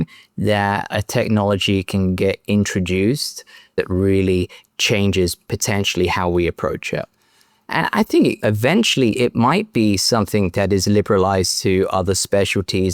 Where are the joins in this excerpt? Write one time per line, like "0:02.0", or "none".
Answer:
0:03.7